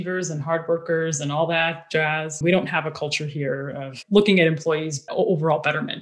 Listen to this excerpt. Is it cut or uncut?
cut